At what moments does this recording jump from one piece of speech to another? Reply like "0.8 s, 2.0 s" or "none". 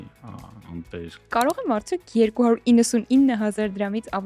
1.3 s